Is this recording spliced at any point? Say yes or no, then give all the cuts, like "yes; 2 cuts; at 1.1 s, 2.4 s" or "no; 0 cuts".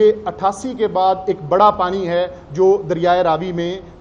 no; 0 cuts